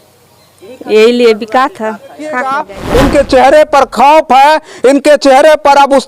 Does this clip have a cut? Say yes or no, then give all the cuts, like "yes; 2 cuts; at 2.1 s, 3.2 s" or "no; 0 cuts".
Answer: yes; 1 cut; at 2.7 s